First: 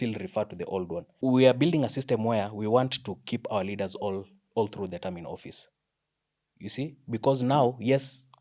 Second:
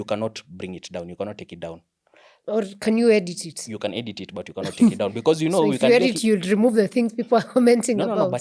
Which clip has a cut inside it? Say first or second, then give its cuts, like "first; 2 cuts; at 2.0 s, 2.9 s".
first; 1 cut; at 1.2 s